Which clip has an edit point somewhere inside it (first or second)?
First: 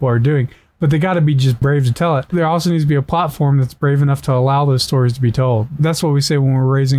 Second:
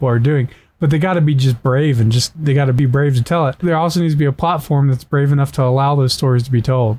first